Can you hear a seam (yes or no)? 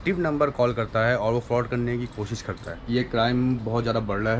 yes